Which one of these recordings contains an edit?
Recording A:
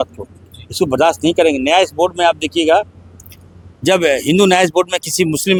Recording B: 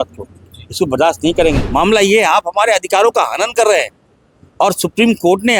B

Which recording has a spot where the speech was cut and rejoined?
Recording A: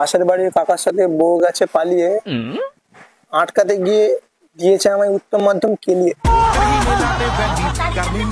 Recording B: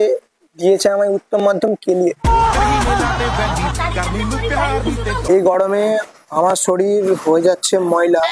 B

